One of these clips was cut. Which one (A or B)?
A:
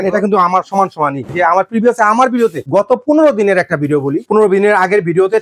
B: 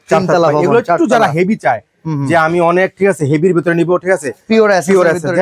A